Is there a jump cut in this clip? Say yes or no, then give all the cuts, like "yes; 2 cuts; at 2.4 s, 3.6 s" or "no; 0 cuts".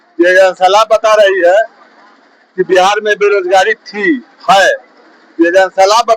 no; 0 cuts